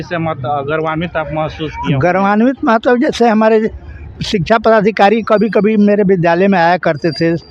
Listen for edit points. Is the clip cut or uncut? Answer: uncut